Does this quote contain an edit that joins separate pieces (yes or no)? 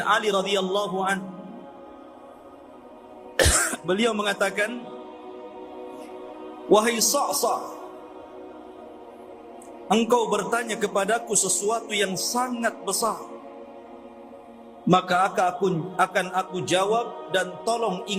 yes